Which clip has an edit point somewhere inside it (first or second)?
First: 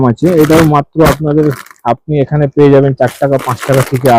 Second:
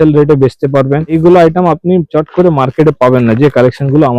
second